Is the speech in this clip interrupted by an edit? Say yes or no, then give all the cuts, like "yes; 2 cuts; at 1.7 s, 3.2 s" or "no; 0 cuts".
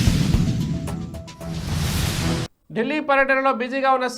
yes; 1 cut; at 2.5 s